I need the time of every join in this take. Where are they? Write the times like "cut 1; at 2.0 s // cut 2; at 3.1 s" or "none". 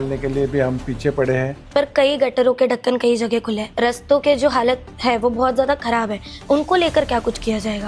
cut 1; at 1.6 s // cut 2; at 3.6 s